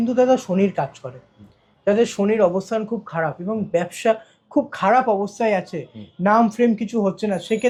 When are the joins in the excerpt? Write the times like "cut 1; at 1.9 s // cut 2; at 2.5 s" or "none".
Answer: none